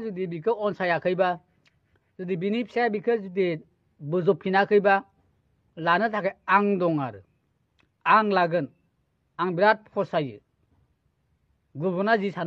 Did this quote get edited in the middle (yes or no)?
no